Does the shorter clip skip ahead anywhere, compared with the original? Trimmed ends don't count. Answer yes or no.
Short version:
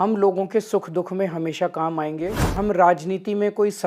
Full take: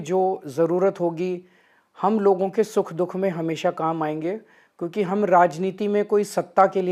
yes